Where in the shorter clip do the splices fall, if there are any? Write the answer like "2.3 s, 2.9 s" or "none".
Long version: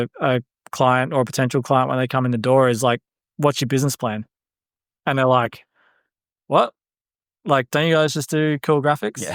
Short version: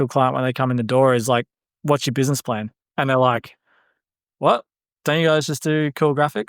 2.8 s, 5.0 s